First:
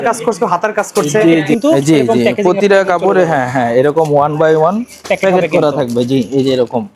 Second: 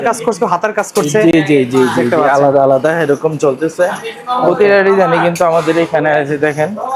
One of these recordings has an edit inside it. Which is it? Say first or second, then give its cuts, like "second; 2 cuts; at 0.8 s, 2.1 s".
first; 1 cut; at 1.5 s